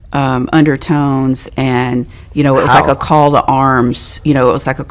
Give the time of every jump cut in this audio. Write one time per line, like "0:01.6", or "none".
0:01.7
0:03.0